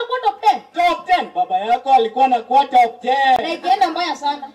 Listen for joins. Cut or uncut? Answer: uncut